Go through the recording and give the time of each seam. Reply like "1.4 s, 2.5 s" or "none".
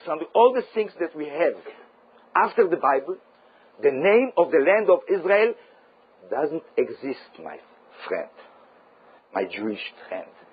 none